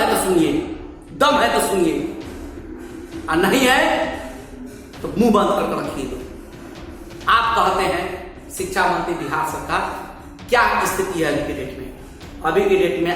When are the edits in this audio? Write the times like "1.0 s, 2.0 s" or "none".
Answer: none